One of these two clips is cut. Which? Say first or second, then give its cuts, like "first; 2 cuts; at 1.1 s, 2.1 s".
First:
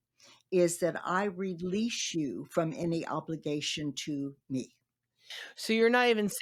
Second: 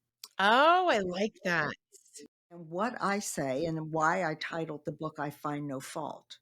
second; 1 cut; at 2.7 s